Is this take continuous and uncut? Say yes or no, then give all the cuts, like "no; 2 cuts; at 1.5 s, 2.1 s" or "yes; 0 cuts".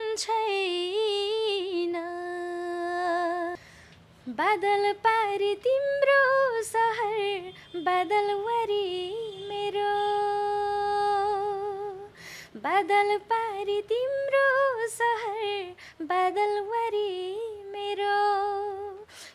no; 1 cut; at 3.6 s